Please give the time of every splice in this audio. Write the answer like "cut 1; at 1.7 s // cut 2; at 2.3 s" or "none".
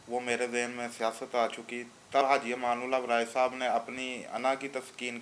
cut 1; at 2.2 s